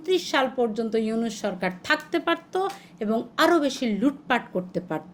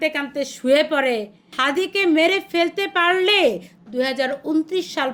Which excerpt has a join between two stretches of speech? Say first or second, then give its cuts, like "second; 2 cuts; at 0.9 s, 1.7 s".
second; 2 cuts; at 1.5 s, 3.7 s